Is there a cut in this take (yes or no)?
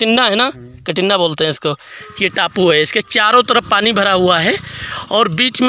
yes